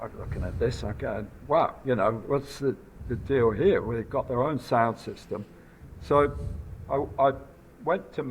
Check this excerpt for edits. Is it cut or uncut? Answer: uncut